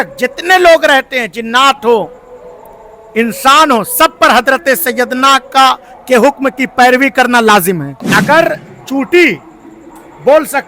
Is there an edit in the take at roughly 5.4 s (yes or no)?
no